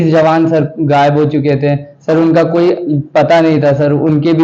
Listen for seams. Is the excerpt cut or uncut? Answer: uncut